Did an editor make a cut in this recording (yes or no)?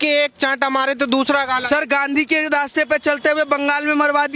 no